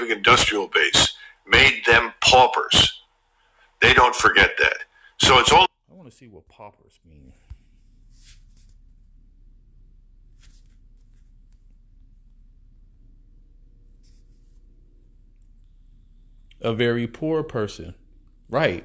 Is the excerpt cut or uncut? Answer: uncut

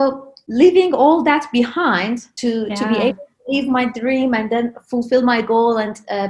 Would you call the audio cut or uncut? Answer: cut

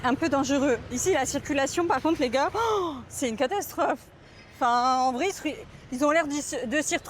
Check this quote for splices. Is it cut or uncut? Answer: uncut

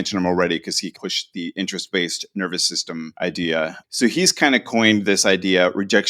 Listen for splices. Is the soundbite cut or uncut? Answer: cut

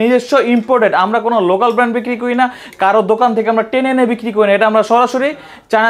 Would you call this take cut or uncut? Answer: uncut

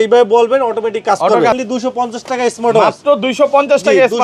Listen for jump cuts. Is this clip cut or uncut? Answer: cut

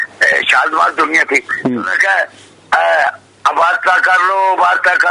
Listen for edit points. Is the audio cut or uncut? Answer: uncut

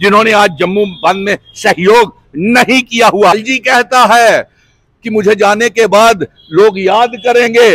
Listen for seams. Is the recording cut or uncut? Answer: cut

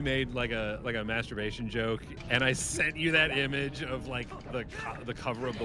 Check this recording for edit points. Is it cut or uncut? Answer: cut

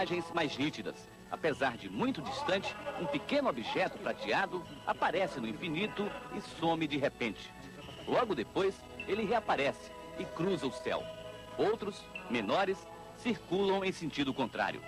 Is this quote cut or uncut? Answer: cut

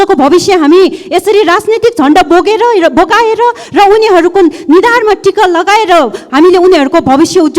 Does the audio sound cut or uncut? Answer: uncut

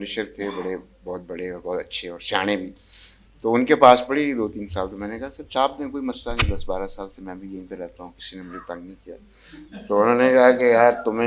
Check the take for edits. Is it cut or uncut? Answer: uncut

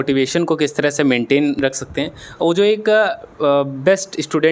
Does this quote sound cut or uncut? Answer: uncut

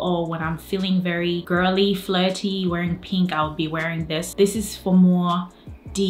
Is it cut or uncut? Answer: cut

